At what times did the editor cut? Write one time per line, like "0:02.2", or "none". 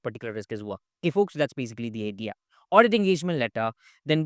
0:02.5